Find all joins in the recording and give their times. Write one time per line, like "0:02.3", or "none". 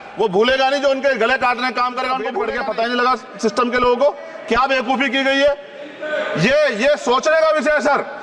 0:02.4